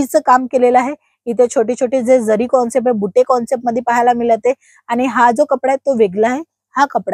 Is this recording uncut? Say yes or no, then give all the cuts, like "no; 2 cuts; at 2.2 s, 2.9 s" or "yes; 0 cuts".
yes; 0 cuts